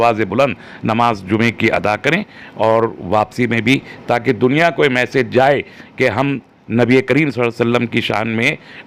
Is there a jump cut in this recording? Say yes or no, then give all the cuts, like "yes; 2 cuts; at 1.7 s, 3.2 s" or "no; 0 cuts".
no; 0 cuts